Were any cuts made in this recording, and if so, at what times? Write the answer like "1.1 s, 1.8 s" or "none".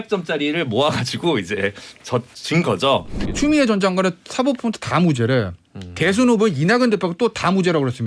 3.2 s